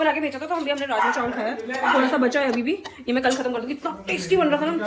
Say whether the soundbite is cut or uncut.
uncut